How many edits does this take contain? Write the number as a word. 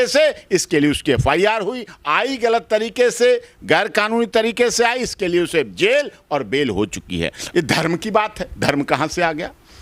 one